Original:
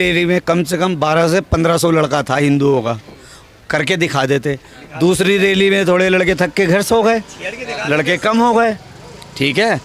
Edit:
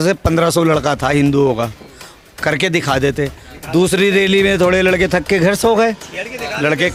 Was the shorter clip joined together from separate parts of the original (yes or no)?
no